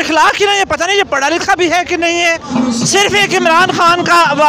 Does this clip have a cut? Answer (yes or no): yes